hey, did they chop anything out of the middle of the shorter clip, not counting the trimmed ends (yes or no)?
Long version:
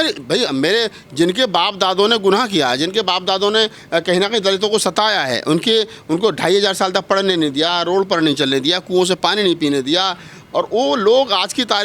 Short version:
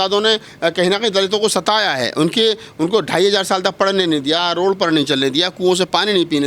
no